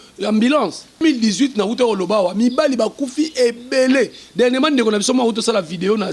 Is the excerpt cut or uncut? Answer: cut